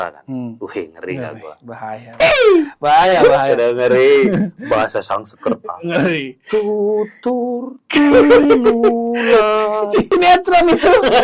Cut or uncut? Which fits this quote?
cut